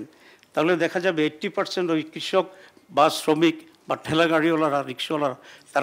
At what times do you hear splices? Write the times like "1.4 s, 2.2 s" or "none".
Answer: none

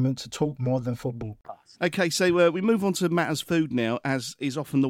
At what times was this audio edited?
none

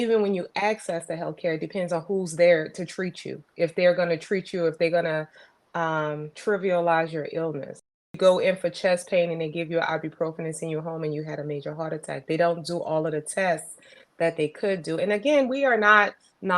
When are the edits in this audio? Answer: 6.3 s, 8.2 s

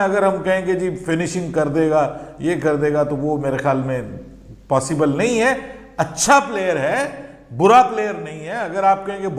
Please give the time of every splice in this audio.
none

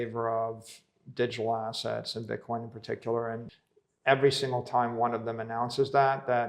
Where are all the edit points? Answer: 3.5 s

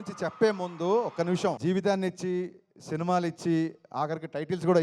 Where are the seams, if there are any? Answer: 1.6 s

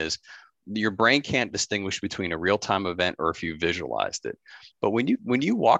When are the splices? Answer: 4.6 s

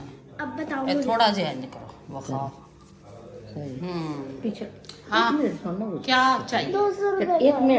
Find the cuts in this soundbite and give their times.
none

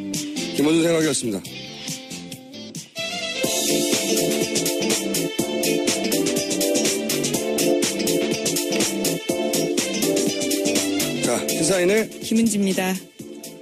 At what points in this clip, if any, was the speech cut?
8.6 s

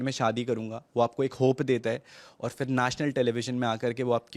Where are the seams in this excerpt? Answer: none

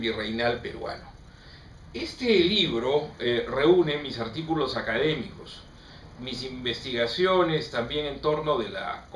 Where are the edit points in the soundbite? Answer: 3.8 s

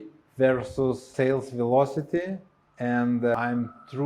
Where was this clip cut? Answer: 1.1 s, 3.3 s

